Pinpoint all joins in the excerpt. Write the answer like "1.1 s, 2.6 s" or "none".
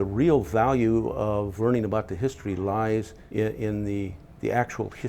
1.5 s, 3.2 s

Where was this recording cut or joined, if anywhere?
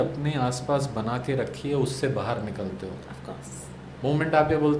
none

